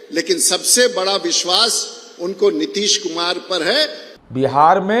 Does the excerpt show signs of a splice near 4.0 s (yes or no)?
yes